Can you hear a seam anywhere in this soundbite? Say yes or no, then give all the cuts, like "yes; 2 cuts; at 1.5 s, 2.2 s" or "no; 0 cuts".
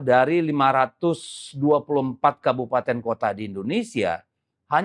no; 0 cuts